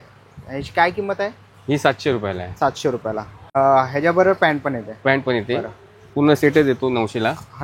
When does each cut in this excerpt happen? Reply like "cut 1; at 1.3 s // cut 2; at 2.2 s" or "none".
cut 1; at 3.6 s